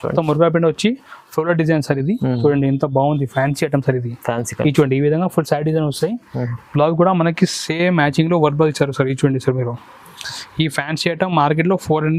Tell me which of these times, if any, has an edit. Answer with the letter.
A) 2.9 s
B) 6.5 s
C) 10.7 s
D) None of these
D